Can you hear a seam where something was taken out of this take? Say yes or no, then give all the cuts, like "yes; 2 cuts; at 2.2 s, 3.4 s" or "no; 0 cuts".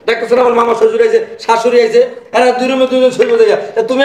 no; 0 cuts